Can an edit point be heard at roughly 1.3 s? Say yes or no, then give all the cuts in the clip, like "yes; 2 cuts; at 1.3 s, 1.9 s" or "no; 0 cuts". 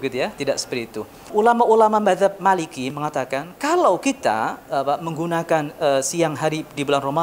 yes; 1 cut; at 1.3 s